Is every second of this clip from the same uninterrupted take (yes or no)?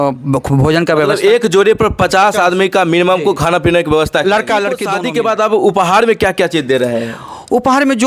no